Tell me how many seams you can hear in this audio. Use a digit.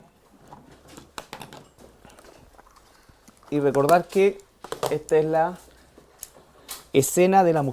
1